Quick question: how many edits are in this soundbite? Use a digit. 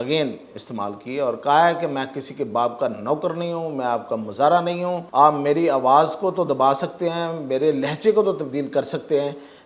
1